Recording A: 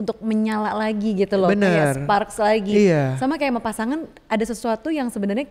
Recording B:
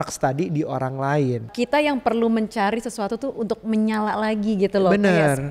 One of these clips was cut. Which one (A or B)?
B